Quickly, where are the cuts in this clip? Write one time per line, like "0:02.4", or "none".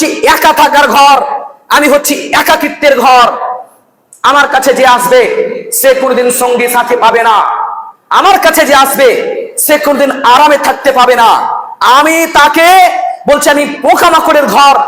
none